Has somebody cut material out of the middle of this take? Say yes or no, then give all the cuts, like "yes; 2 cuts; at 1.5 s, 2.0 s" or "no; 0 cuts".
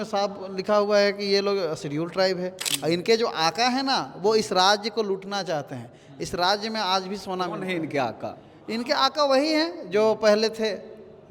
yes; 1 cut; at 2.6 s